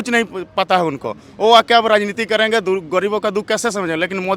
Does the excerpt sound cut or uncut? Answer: uncut